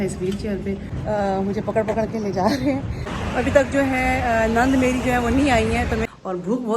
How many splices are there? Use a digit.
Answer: 3